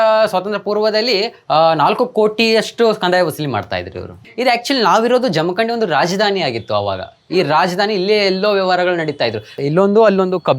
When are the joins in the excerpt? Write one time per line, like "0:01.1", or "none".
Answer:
0:04.2
0:09.6